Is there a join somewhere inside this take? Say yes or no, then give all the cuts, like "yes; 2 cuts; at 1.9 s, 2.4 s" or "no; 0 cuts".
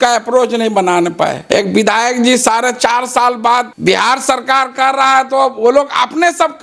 yes; 2 cuts; at 1.4 s, 3.7 s